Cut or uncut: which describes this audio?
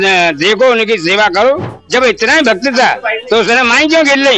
cut